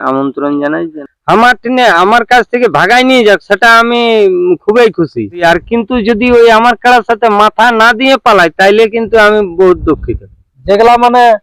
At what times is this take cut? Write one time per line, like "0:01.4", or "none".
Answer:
0:01.0
0:05.4
0:10.5